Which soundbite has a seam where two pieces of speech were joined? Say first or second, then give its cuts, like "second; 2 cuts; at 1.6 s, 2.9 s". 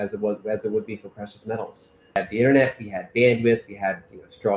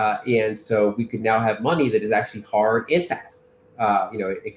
first; 1 cut; at 2.2 s